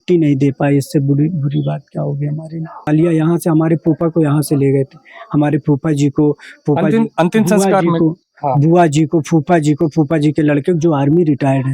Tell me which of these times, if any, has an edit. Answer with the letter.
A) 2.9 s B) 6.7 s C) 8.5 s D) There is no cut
A